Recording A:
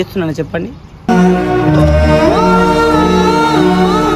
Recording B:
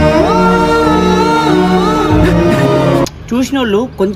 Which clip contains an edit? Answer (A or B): B